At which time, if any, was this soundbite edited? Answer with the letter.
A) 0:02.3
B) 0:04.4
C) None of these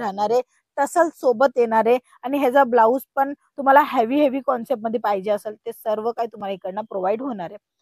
C